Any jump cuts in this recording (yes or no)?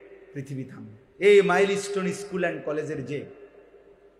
no